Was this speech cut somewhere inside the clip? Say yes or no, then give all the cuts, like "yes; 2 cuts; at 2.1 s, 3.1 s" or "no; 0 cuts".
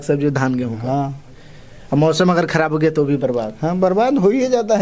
no; 0 cuts